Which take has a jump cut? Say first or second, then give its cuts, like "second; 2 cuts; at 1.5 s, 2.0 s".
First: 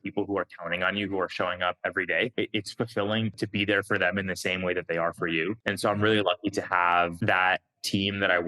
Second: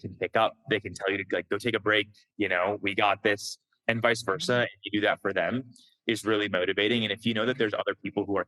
first; 4 cuts; at 2.3 s, 3.3 s, 5.6 s, 7.2 s